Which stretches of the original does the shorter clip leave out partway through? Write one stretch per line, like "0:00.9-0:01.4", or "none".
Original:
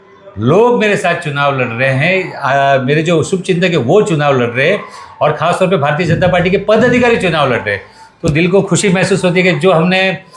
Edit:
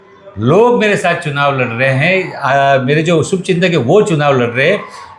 none